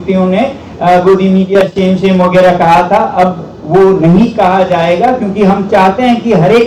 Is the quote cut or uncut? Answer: uncut